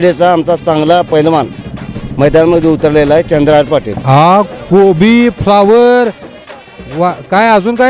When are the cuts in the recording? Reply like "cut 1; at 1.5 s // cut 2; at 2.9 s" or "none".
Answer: none

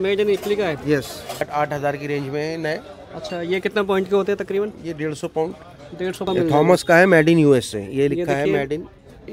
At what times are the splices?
cut 1; at 1.5 s // cut 2; at 6.3 s

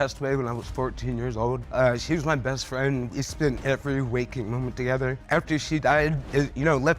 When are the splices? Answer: cut 1; at 1.6 s // cut 2; at 3.6 s // cut 3; at 5.2 s

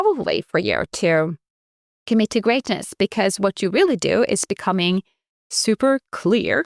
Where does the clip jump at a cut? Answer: none

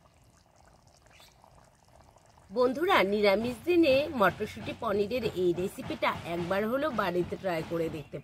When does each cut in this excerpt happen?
cut 1; at 2.4 s

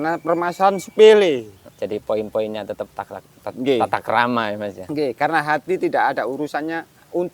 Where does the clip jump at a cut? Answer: cut 1; at 1.6 s

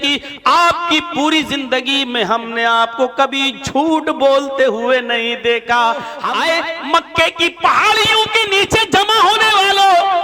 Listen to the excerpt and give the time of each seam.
cut 1; at 6.2 s

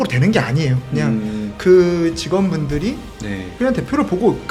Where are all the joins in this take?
none

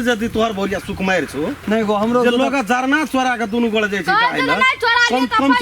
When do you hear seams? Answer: cut 1; at 1.6 s

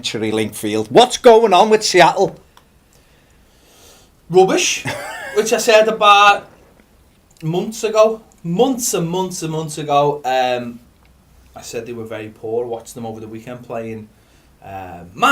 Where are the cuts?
cut 1; at 13.2 s

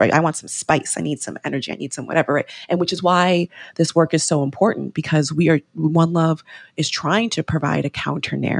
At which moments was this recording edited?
cut 1; at 2.5 s

